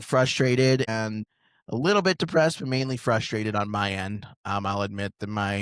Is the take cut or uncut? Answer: cut